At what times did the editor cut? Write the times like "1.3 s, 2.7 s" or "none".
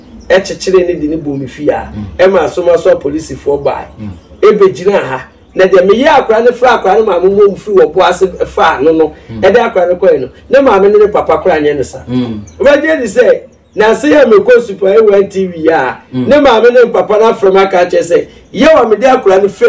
12.5 s